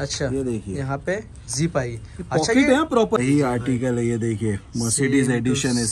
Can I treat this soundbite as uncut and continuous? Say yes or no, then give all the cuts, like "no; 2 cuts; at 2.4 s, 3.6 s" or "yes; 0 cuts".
no; 1 cut; at 3.2 s